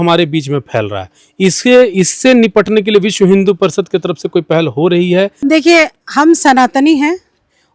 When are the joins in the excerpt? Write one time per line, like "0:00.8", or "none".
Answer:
0:05.3